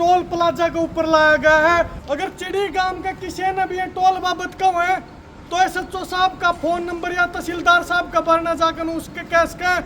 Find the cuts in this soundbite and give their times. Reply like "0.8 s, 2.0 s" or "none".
2.0 s